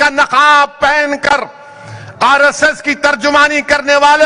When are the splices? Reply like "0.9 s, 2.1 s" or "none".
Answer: none